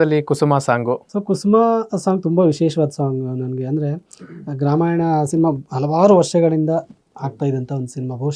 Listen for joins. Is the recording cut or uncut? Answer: cut